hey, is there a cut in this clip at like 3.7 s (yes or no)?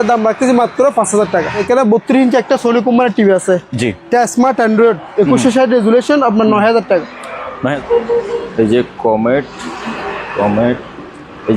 no